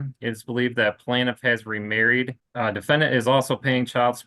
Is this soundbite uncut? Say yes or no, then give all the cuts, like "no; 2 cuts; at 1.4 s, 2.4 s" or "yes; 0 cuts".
no; 1 cut; at 2.4 s